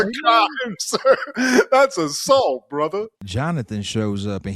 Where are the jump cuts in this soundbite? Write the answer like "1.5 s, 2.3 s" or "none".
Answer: 3.2 s